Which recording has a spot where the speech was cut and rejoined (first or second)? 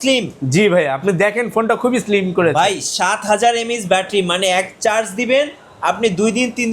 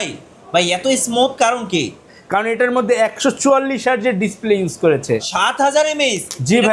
second